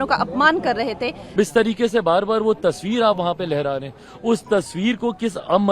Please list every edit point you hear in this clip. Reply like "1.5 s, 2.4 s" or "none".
1.3 s